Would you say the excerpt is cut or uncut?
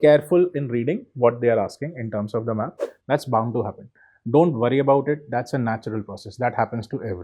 cut